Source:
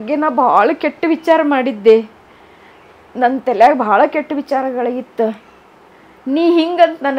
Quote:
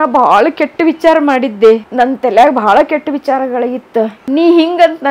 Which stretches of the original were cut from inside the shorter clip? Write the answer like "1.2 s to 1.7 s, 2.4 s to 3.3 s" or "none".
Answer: 2.1 s to 3.1 s, 5.4 s to 6.2 s